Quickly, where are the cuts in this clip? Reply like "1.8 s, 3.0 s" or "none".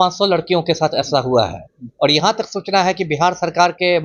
none